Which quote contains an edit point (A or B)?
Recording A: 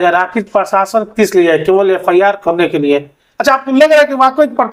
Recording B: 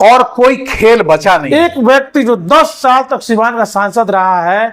B